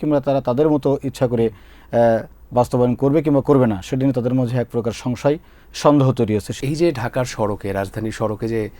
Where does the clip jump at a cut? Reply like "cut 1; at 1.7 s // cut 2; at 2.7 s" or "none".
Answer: cut 1; at 6.5 s